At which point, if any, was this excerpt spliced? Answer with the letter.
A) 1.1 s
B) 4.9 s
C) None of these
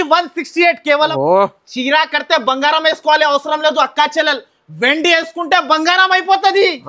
A